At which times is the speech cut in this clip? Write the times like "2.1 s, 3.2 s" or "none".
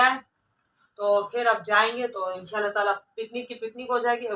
none

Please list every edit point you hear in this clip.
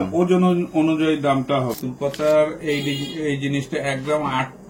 1.8 s

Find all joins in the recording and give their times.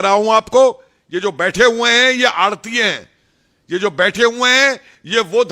none

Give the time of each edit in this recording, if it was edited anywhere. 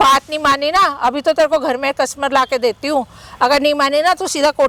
none

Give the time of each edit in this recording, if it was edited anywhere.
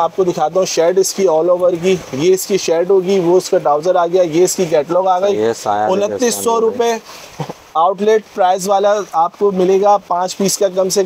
none

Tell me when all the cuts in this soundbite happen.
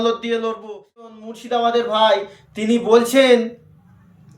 1.1 s

